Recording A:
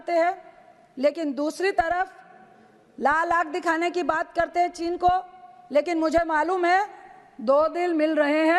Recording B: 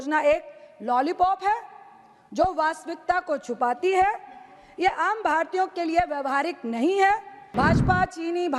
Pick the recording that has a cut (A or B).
B